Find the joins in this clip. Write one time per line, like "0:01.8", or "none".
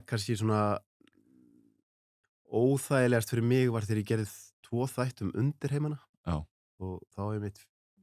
none